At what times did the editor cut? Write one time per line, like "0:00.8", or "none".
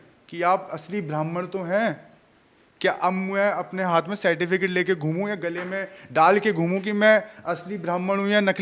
none

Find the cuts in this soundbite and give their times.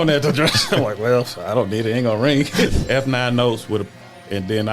0:02.7

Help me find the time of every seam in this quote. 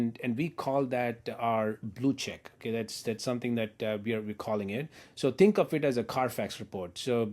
0:05.0

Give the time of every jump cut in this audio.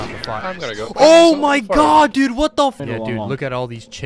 0:02.8

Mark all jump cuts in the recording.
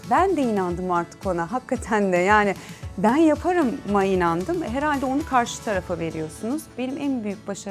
0:06.7

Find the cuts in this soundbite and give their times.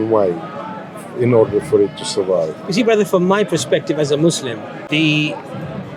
0:04.8

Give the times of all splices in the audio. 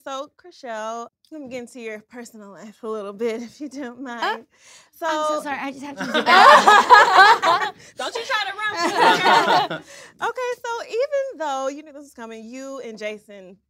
0:01.1

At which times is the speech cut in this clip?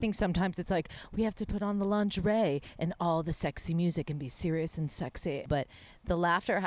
0:05.5

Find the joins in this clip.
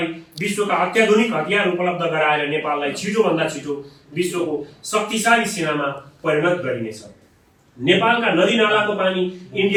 none

